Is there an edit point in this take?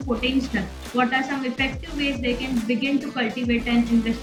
no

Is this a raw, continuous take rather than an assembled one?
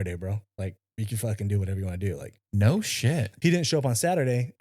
no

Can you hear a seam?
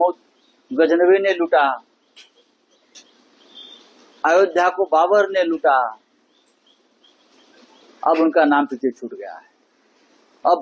no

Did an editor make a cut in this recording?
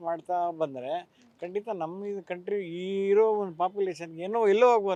no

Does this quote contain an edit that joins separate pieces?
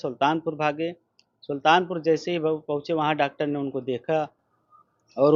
no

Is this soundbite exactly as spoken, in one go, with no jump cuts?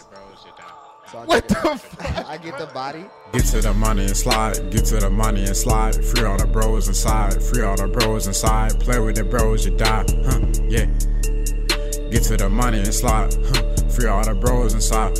no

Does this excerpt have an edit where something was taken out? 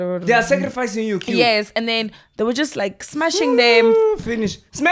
no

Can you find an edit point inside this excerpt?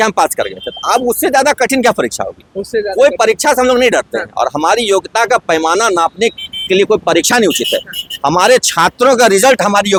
no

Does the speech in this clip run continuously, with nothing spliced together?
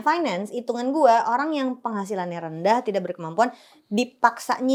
yes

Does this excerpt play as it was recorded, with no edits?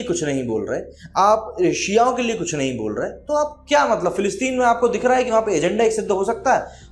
yes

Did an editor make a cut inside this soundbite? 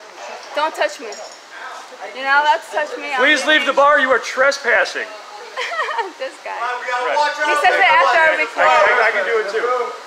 no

